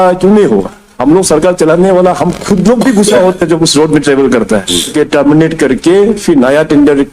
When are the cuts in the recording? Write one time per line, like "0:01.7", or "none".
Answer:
0:05.1